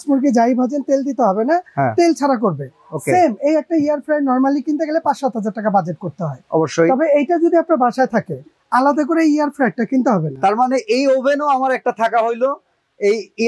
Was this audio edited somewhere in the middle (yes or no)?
no